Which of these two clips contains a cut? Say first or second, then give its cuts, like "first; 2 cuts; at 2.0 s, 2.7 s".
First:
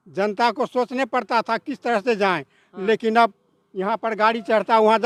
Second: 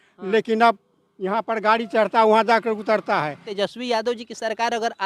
second; 1 cut; at 3.5 s